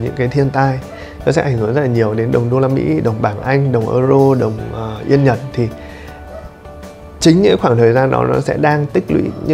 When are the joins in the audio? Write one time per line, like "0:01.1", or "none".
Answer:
none